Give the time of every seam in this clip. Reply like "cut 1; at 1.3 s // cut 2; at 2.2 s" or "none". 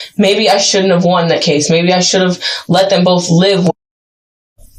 none